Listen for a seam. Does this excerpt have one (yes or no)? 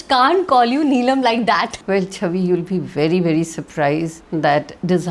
yes